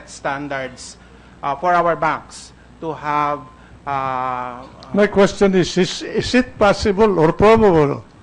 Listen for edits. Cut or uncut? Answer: cut